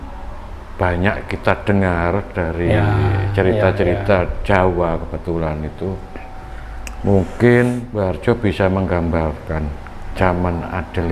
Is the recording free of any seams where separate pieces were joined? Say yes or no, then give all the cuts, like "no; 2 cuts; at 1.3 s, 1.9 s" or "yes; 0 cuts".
no; 1 cut; at 7.9 s